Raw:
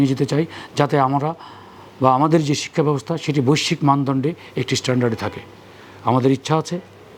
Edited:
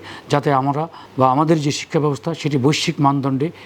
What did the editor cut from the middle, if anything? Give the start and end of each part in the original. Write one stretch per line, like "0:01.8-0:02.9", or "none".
0:01.4-0:01.8